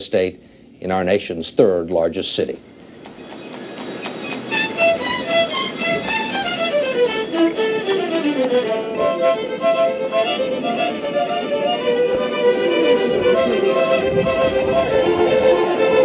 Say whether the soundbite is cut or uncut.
uncut